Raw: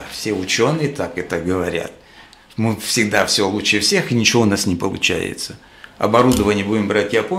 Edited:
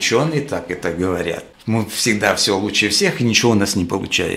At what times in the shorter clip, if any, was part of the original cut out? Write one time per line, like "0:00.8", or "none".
0:01.5